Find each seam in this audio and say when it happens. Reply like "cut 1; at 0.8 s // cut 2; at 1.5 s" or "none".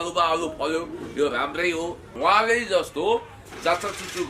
cut 1; at 2.0 s